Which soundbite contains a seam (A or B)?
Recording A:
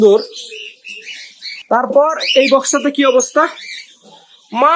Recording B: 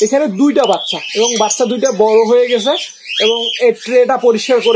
A